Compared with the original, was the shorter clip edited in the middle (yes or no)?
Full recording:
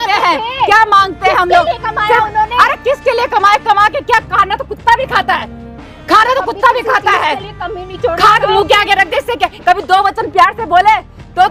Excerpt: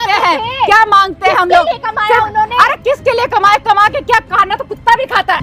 no